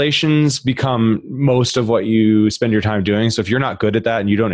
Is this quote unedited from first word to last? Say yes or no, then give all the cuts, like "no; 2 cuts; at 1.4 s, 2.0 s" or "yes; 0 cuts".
yes; 0 cuts